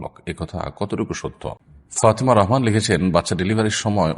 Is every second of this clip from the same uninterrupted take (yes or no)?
no